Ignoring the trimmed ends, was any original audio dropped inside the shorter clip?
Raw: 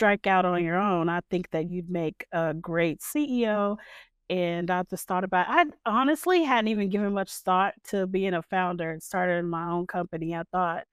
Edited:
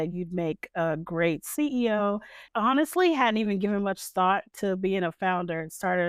yes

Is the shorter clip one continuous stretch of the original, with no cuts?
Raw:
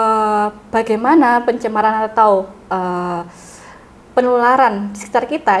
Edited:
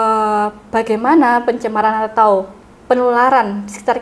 no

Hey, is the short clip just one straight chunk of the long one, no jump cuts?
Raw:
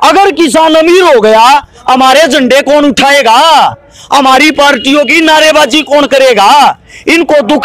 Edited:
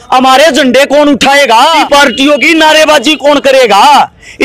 no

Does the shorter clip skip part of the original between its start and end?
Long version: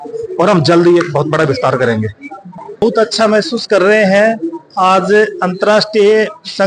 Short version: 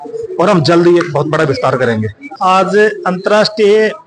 yes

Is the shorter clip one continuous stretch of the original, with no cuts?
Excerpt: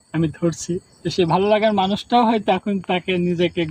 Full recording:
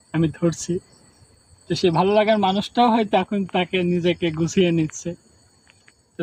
no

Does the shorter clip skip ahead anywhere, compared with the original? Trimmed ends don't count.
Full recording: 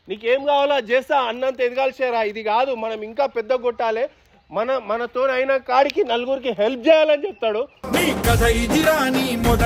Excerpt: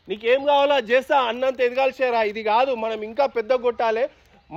no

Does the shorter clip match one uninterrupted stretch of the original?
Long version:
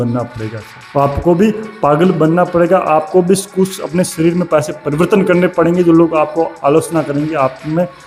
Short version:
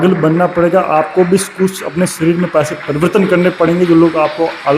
yes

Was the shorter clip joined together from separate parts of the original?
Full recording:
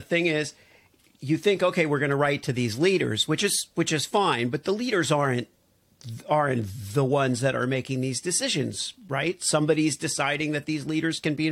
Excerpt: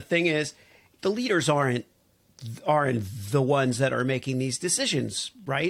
yes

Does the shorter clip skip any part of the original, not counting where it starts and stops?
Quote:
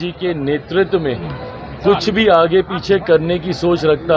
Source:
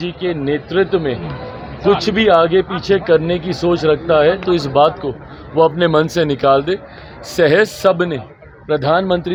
no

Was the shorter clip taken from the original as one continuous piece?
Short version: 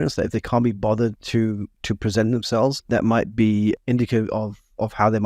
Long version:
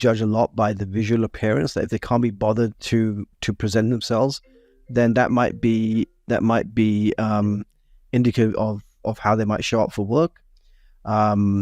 no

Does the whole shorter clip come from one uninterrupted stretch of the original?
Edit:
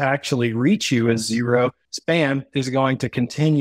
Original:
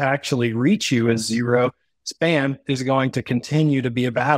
no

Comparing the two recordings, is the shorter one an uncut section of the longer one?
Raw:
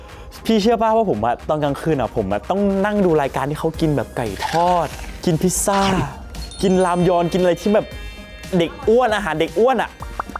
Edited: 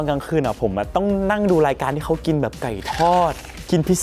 yes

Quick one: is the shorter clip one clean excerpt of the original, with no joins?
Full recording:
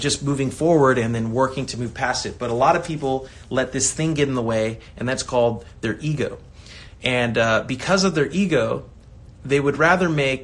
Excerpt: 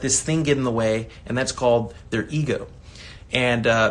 yes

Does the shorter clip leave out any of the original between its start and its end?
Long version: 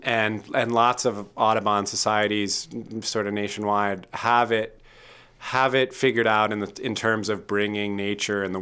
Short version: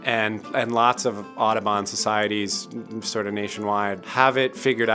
yes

